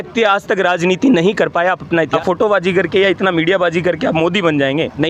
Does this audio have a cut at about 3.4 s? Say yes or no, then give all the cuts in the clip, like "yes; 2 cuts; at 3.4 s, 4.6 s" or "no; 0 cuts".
no; 1 cut; at 2.1 s